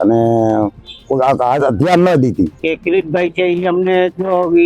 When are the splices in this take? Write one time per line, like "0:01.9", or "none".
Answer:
0:02.6